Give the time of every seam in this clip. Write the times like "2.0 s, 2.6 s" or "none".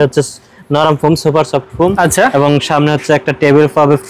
none